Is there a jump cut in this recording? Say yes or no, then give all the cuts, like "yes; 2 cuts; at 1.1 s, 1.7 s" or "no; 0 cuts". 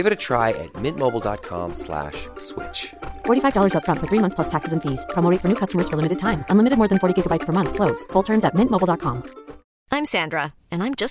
no; 0 cuts